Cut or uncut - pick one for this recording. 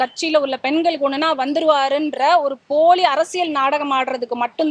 uncut